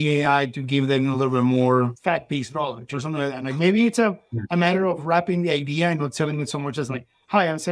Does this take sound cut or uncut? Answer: uncut